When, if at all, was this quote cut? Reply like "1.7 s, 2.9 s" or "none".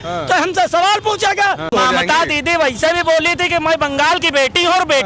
1.7 s